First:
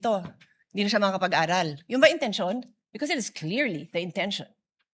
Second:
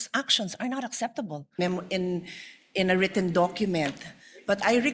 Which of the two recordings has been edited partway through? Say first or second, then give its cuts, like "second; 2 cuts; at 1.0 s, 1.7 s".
second; 1 cut; at 1.6 s